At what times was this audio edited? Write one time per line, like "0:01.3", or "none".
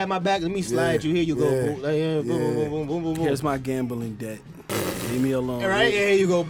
none